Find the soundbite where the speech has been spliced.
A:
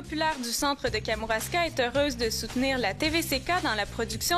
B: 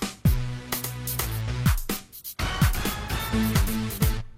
B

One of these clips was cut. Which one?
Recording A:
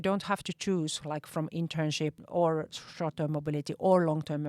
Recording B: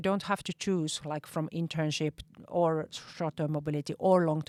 A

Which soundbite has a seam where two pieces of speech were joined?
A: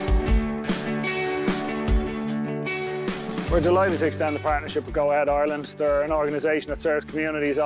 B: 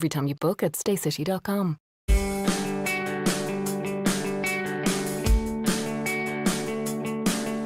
B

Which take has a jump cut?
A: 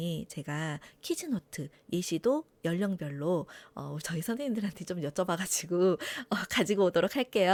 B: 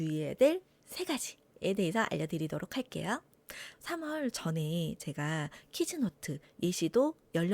B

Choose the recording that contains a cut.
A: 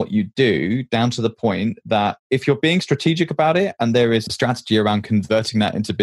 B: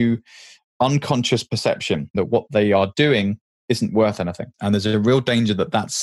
B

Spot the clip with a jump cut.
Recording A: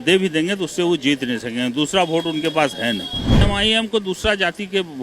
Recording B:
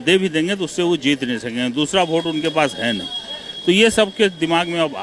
A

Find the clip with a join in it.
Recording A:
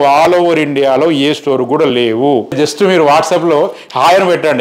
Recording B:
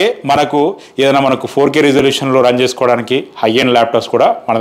A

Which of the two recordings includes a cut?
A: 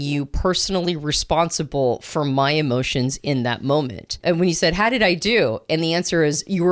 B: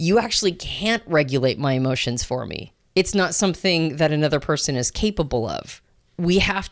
A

